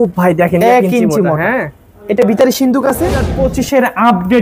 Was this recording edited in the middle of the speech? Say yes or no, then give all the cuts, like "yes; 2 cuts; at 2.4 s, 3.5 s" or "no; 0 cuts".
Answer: yes; 1 cut; at 3.3 s